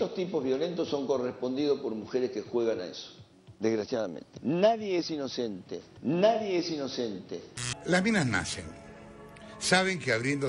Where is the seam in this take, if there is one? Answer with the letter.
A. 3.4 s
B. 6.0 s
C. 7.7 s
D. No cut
C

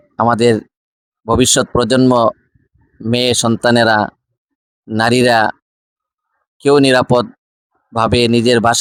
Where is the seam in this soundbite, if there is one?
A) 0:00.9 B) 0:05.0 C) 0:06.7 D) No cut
D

